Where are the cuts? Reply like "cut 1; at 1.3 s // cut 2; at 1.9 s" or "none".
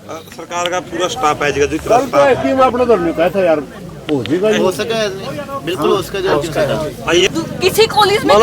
cut 1; at 7.3 s